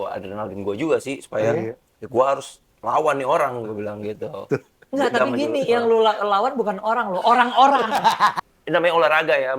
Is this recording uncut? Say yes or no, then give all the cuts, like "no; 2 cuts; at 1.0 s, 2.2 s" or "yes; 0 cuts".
no; 1 cut; at 8.4 s